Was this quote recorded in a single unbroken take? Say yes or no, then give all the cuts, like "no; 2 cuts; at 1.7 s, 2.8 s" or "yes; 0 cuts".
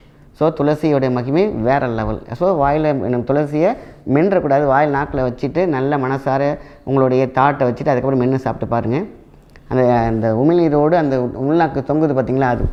yes; 0 cuts